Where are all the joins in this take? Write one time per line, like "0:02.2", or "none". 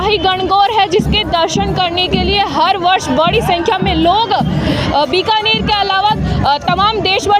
none